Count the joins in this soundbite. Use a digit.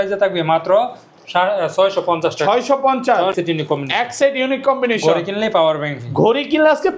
1